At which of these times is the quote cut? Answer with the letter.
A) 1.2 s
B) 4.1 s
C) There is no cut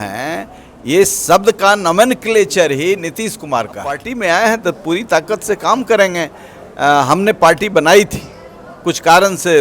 B